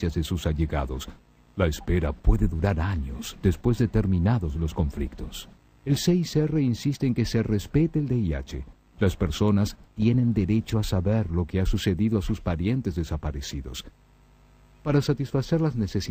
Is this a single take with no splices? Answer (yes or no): no